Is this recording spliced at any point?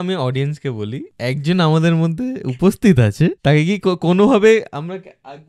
yes; 2 cuts; at 1.1 s, 3.4 s

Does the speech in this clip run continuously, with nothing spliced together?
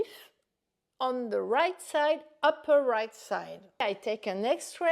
no; 1 cut; at 3.8 s

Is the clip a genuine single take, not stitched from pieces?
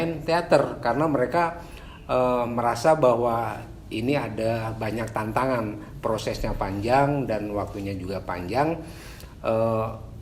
yes; 0 cuts

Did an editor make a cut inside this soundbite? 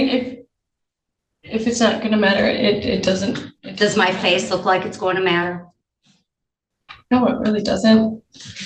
no; 0 cuts

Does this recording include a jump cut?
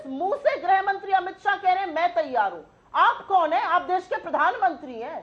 no; 0 cuts

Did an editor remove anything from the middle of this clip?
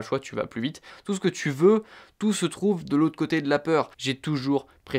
yes; 2 cuts; at 0.9 s, 4.0 s

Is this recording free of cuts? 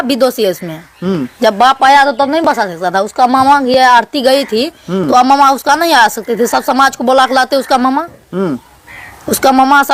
yes; 0 cuts

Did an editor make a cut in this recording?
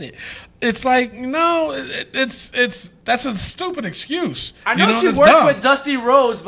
yes; 2 cuts; at 2.9 s, 4.5 s

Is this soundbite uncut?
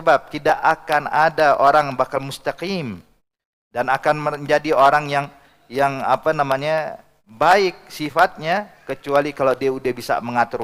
yes; 0 cuts

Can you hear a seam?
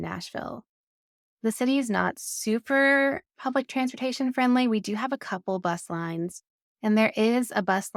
no; 0 cuts

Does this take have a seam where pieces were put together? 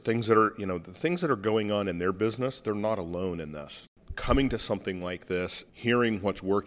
yes; 2 cuts; at 3.8 s, 5.6 s

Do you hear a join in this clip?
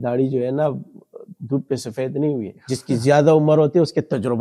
no; 0 cuts

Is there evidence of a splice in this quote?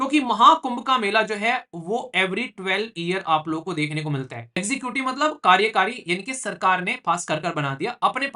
yes; 1 cut; at 4.6 s

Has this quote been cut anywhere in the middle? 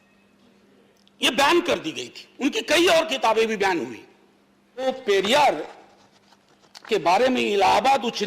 yes; 1 cut; at 4.8 s

